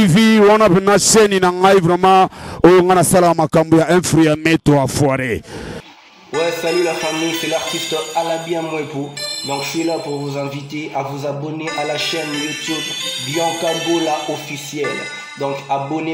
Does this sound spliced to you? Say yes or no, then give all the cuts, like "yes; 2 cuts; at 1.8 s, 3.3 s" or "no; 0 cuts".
no; 0 cuts